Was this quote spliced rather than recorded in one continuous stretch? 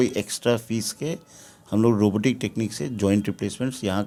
no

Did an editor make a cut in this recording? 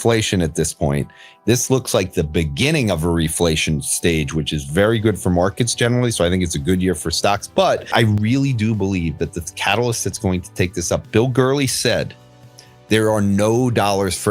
yes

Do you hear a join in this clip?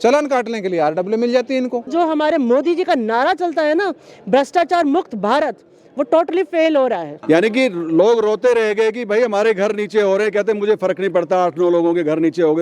yes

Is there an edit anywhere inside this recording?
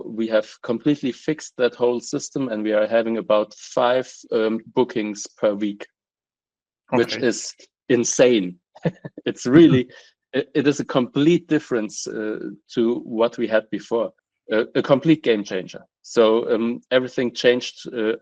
yes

